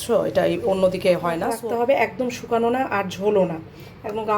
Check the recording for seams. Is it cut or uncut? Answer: cut